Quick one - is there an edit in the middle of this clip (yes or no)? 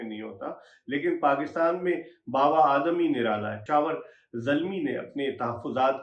yes